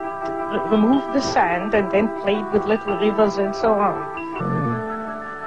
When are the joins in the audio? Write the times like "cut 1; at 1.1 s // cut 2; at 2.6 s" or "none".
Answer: none